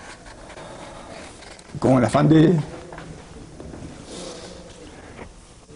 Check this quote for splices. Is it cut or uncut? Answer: cut